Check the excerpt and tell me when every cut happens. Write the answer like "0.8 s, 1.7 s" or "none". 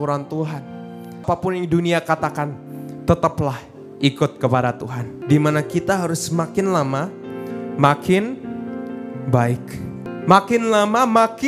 1.2 s, 5.1 s, 10.1 s